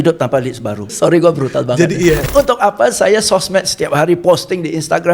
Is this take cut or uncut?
cut